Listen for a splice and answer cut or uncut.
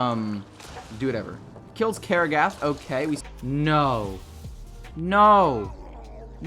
cut